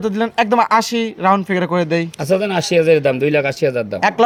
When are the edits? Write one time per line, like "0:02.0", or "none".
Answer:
none